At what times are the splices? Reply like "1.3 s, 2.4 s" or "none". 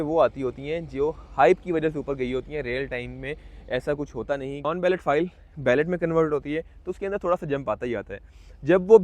4.7 s